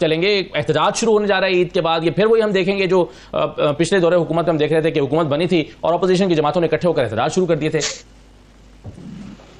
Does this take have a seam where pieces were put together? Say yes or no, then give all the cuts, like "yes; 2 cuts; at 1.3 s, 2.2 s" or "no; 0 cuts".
no; 0 cuts